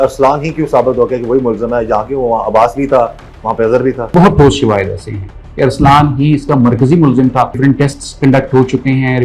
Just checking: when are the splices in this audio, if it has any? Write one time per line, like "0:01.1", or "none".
0:04.0
0:07.6

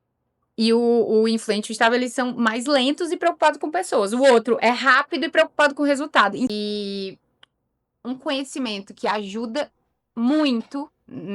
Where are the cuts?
0:06.5

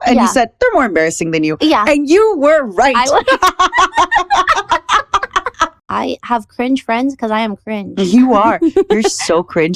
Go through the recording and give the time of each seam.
0:05.8

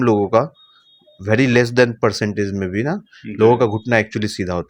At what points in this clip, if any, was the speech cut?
none

